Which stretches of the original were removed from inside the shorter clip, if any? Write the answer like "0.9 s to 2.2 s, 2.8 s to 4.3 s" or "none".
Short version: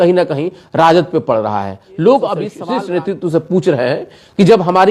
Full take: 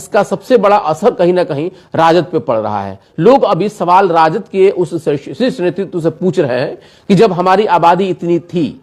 3.7 s to 5.2 s